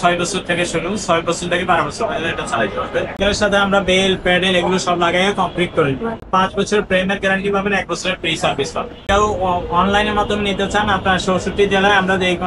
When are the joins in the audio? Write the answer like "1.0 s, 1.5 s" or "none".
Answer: 3.2 s, 6.2 s, 9.0 s